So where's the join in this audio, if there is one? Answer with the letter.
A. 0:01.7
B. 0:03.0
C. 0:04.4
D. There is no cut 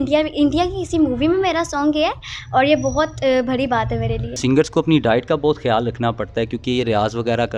C